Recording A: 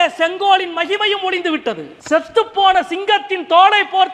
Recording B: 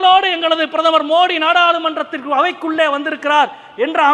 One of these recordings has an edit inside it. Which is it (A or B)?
A